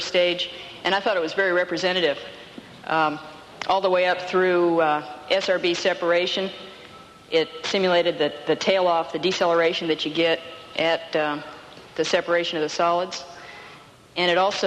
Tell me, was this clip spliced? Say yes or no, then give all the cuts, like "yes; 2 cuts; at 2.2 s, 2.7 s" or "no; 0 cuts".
no; 0 cuts